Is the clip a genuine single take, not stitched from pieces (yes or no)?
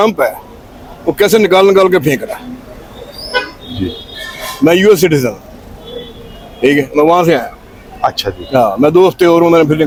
yes